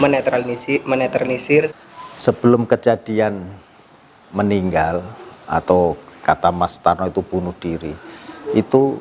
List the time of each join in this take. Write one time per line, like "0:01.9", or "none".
0:01.8